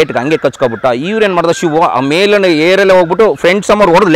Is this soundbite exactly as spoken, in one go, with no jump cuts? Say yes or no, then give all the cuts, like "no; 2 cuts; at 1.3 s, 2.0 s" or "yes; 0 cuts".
yes; 0 cuts